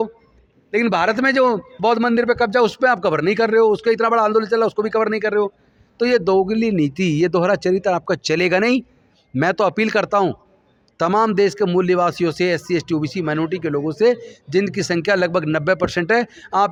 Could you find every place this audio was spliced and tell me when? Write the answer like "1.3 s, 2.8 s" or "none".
none